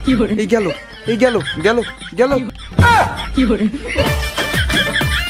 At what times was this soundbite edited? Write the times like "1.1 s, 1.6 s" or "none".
2.6 s